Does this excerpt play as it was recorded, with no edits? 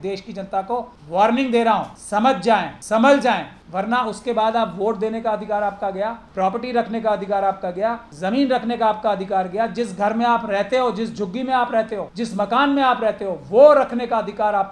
no; 6 cuts; at 1.0 s, 2.5 s, 3.6 s, 6.2 s, 8.1 s, 12.1 s

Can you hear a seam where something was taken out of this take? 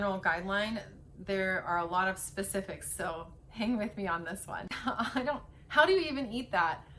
yes; 1 cut; at 4.7 s

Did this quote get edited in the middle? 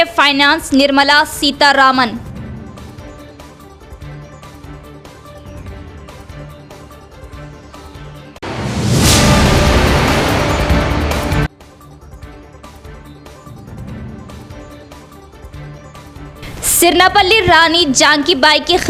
no; 0 cuts

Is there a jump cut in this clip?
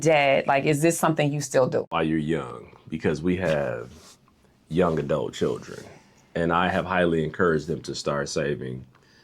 yes; 1 cut; at 1.9 s

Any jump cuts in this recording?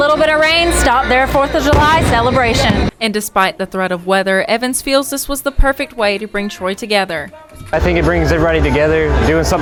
no; 0 cuts

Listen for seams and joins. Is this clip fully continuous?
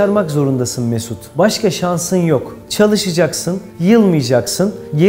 no; 1 cut; at 2.6 s

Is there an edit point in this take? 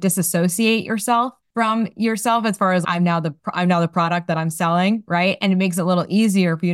yes; 1 cut; at 1.4 s

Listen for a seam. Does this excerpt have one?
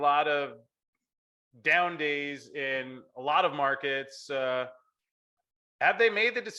no; 0 cuts

